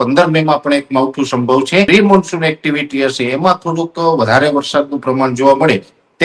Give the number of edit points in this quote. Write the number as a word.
one